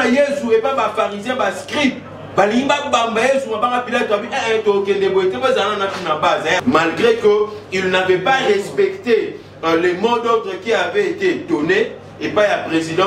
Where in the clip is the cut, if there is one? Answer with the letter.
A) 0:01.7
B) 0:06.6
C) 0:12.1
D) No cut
B